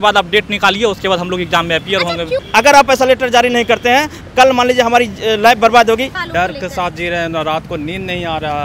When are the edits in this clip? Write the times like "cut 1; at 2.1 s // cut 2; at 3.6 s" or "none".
cut 1; at 2.4 s // cut 2; at 6.2 s